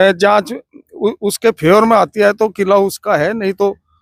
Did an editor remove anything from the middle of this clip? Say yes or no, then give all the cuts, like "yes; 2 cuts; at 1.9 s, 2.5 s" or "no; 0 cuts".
no; 0 cuts